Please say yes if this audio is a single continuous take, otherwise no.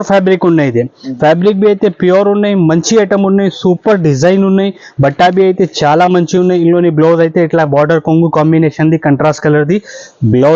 yes